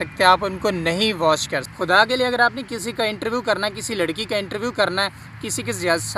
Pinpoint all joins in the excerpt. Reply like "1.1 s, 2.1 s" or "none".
1.6 s

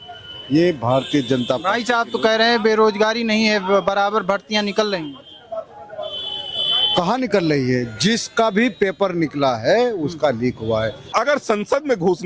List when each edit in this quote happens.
11.0 s

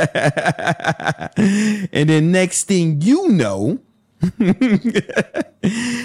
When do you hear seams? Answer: none

